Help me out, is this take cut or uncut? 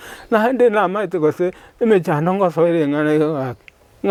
uncut